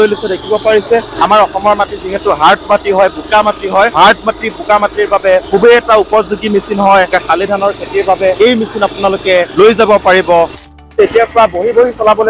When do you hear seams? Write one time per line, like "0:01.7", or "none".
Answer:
0:01.1
0:03.9
0:05.5
0:07.1
0:08.4
0:09.5
0:10.9